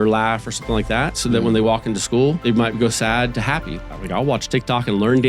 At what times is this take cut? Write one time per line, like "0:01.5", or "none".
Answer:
0:02.4
0:03.8